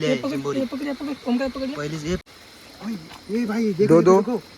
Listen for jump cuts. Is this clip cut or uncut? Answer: cut